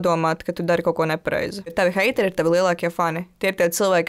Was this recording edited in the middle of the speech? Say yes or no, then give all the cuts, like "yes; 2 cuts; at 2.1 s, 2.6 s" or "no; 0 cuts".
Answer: yes; 1 cut; at 1.7 s